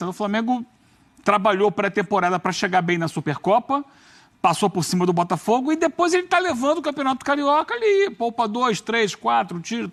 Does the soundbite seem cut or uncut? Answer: uncut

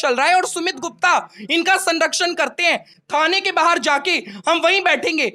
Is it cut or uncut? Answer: uncut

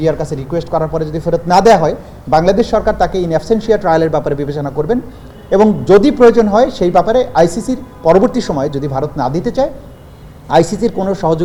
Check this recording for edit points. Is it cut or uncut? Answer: uncut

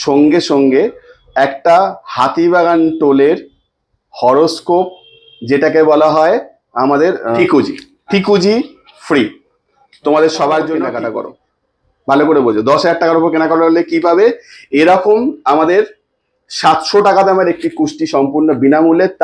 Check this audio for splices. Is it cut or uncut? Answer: cut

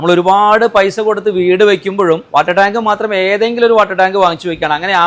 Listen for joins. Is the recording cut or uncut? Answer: cut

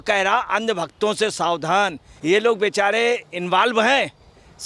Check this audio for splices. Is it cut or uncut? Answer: cut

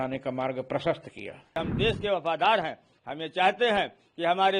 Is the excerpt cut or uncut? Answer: cut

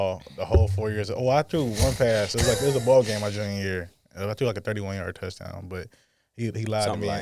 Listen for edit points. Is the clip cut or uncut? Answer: uncut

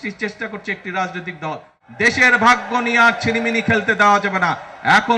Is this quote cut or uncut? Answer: cut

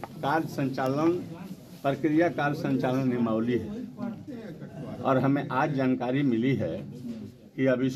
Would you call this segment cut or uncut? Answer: uncut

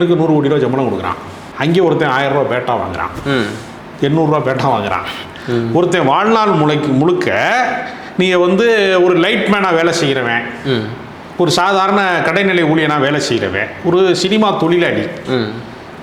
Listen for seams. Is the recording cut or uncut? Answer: uncut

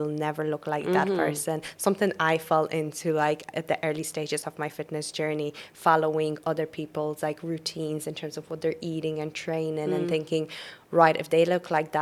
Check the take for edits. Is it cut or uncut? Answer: uncut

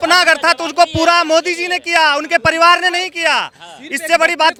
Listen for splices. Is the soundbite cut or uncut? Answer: uncut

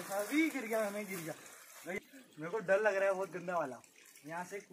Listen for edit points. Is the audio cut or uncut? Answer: cut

